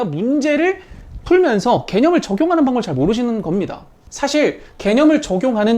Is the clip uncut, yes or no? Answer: no